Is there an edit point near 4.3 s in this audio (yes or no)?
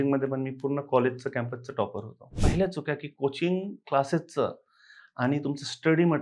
no